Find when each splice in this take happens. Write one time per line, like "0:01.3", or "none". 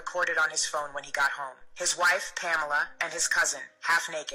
none